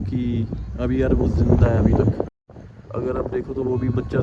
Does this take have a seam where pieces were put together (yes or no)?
no